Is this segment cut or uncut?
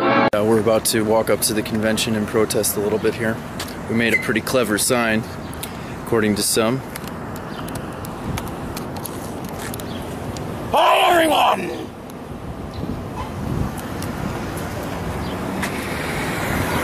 uncut